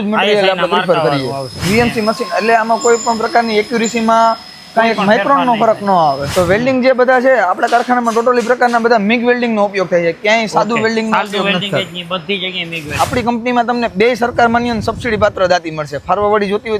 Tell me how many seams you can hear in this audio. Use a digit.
3